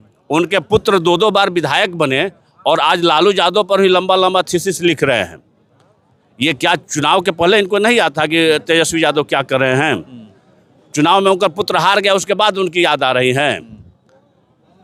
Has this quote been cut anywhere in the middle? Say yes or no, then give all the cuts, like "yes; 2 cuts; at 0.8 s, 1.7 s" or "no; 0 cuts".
no; 0 cuts